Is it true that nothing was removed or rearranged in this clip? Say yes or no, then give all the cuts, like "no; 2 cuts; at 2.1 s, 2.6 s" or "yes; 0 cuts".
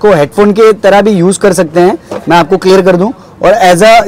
yes; 0 cuts